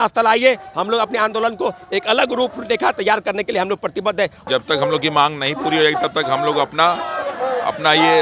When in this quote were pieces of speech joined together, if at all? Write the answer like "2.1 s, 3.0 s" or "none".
4.5 s